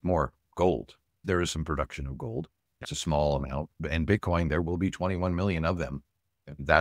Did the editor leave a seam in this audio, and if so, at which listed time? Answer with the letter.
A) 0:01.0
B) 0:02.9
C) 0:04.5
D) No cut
B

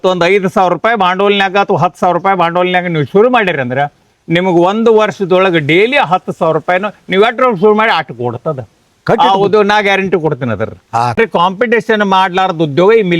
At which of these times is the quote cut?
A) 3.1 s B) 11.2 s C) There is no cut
B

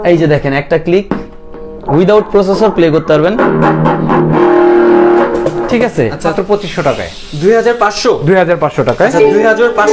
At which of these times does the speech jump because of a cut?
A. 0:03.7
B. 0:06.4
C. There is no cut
B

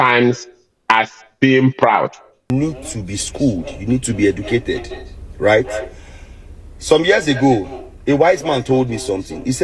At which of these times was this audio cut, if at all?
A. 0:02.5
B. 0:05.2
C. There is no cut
A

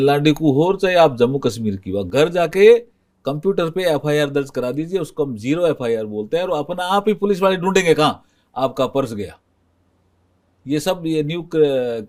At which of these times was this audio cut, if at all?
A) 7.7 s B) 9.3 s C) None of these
C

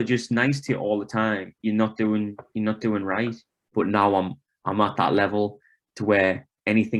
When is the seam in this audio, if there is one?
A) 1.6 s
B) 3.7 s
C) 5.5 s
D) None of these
B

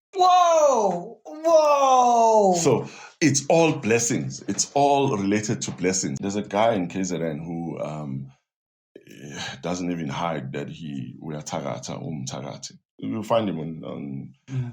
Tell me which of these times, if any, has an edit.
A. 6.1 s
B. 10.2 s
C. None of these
A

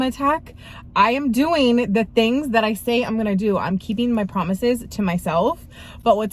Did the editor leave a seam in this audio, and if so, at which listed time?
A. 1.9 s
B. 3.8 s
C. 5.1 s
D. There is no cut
D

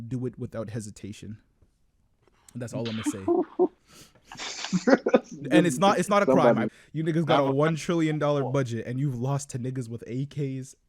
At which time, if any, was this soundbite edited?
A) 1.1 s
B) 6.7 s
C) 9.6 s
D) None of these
B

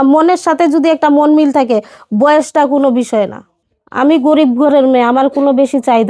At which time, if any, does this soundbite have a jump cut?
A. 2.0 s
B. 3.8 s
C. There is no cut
B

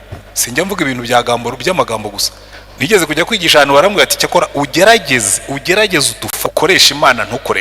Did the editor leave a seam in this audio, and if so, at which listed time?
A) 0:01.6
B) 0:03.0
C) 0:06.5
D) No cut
C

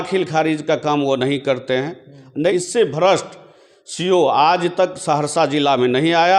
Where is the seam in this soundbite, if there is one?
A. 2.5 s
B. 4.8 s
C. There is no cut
A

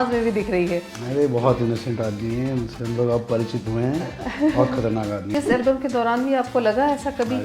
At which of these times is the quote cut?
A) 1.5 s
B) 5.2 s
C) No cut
B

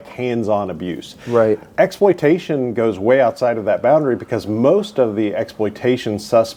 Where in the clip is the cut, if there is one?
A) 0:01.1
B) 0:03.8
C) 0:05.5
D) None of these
D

